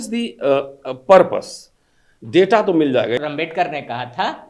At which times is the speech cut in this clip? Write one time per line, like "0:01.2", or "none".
0:03.2